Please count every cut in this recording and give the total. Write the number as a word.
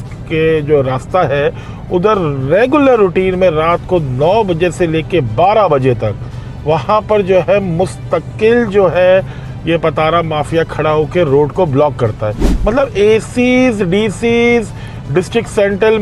one